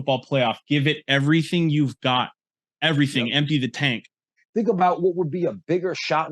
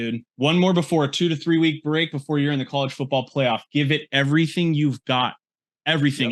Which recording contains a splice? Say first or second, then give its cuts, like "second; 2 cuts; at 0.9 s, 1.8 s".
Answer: first; 1 cut; at 4.4 s